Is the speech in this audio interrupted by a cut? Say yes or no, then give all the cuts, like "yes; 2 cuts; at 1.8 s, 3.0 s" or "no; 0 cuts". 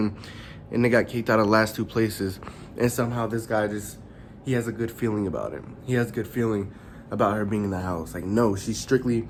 no; 0 cuts